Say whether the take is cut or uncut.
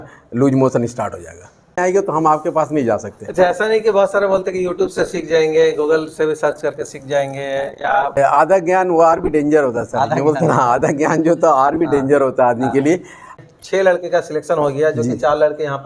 cut